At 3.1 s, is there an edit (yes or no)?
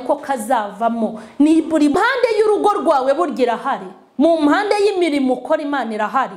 no